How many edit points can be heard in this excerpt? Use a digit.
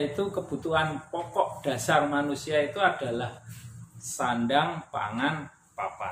0